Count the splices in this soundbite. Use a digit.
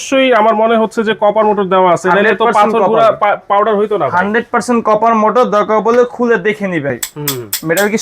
1